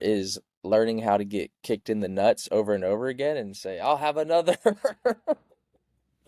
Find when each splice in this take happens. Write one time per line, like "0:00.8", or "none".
none